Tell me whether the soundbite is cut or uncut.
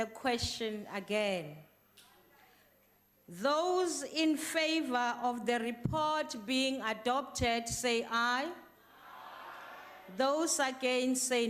uncut